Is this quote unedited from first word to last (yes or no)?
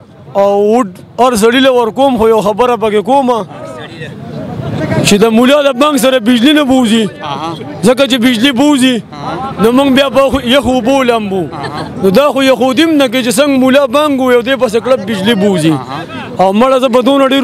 yes